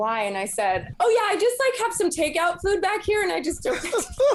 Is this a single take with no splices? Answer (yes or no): yes